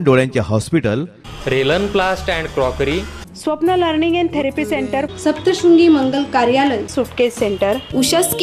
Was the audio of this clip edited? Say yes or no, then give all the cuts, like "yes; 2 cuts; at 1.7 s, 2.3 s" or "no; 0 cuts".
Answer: no; 0 cuts